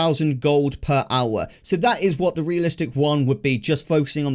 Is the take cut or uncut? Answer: uncut